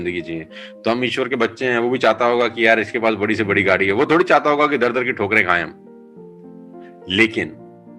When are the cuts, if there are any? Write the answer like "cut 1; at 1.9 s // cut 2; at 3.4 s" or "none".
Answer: cut 1; at 5.8 s // cut 2; at 7.1 s